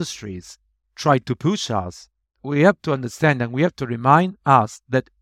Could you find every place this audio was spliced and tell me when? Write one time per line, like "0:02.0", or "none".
0:02.5

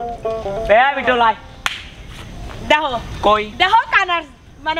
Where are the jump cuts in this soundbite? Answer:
none

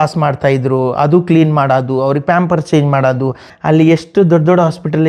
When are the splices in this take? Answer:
0:03.5

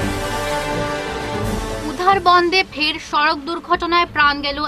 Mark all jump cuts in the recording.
0:01.4

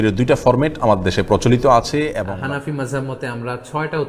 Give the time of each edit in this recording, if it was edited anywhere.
0:02.2

